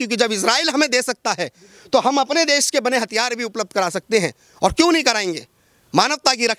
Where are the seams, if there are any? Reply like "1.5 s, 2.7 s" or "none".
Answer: none